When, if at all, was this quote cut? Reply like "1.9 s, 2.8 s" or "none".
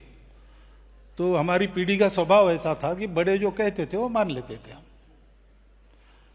none